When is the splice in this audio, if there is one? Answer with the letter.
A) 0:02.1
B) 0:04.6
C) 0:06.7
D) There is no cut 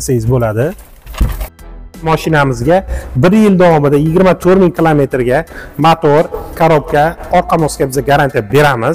A